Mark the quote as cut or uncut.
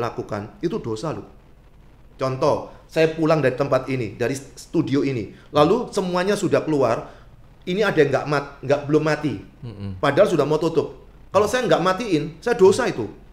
uncut